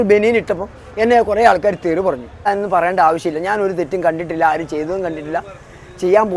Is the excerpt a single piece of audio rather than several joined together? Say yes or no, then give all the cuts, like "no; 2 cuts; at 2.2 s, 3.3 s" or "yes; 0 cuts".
no; 1 cut; at 2.5 s